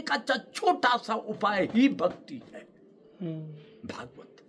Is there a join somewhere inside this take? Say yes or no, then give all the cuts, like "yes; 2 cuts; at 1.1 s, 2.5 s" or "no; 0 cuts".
no; 0 cuts